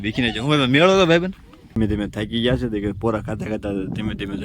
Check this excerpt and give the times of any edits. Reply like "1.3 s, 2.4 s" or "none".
1.8 s